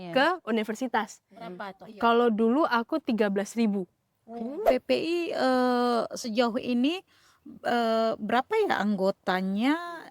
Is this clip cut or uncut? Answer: cut